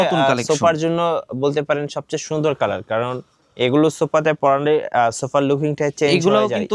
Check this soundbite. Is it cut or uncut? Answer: uncut